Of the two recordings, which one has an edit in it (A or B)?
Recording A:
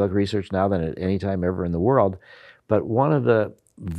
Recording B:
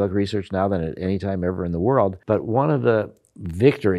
B